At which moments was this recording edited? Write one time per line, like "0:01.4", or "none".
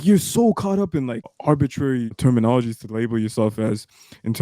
0:01.3
0:02.1